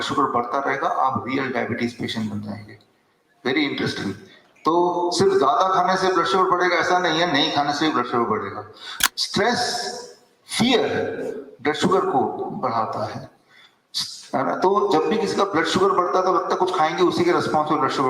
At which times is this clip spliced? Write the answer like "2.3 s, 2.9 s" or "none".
9.0 s